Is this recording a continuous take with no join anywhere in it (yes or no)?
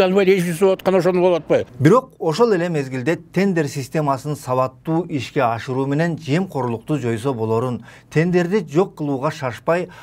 yes